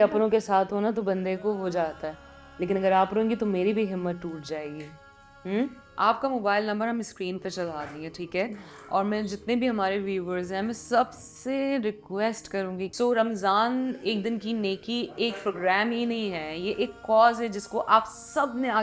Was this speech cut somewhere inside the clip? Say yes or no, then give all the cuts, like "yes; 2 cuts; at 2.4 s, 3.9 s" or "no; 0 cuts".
yes; 2 cuts; at 5.8 s, 12.9 s